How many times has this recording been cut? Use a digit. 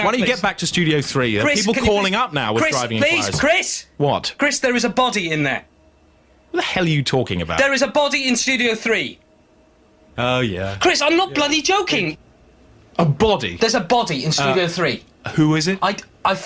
1